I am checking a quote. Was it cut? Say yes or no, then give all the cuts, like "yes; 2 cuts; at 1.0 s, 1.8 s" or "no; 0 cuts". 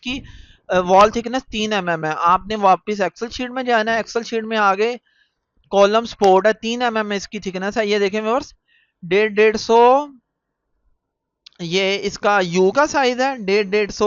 no; 0 cuts